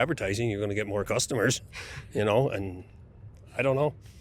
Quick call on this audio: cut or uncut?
uncut